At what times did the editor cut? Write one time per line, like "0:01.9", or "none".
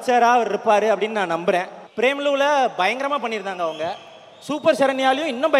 0:01.8